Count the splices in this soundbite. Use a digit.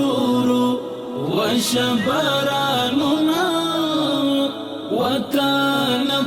0